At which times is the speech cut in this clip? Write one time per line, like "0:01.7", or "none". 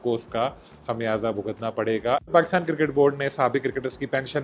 0:02.3